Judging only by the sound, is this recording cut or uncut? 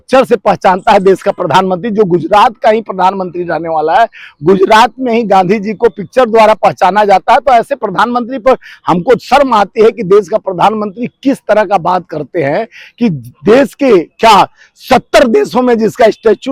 uncut